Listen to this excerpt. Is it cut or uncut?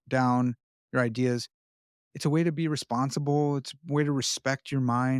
uncut